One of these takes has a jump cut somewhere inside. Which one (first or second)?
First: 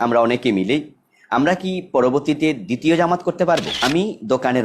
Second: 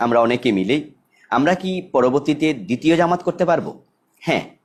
first